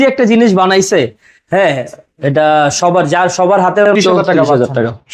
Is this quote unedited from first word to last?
no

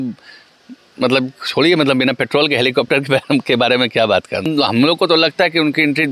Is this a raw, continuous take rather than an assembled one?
no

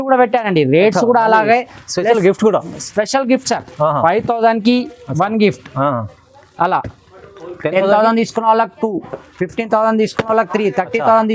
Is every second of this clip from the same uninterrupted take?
yes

